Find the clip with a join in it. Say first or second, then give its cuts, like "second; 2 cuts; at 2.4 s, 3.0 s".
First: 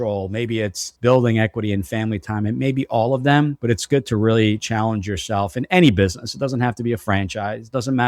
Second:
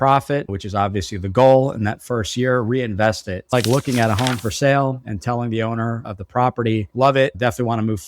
second; 1 cut; at 3.3 s